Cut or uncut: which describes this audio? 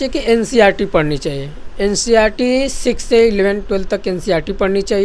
uncut